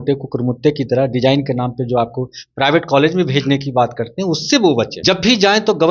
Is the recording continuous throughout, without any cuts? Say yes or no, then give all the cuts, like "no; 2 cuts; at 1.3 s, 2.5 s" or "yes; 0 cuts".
no; 1 cut; at 5.0 s